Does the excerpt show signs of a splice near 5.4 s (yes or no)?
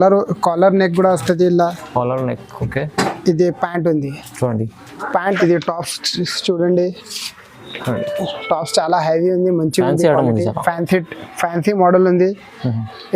yes